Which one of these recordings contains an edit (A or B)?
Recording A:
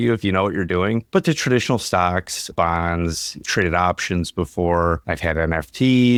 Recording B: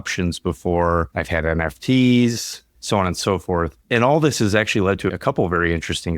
B